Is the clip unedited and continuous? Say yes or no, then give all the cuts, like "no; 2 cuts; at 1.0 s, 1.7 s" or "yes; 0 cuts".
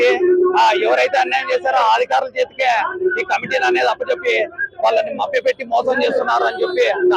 yes; 0 cuts